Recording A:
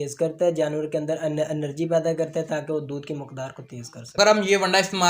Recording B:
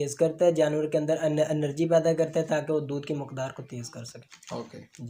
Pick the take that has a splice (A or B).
A